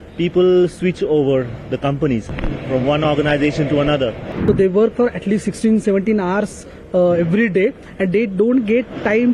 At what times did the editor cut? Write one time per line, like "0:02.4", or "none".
0:04.3